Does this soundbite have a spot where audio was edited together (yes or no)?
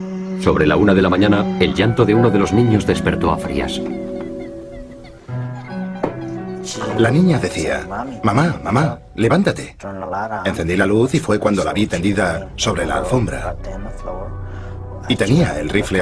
no